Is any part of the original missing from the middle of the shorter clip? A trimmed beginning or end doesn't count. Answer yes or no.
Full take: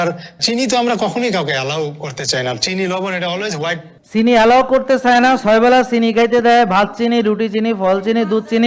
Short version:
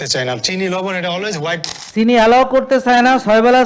no